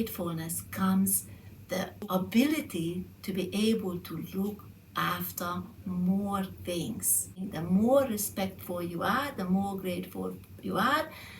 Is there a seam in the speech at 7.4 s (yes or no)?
yes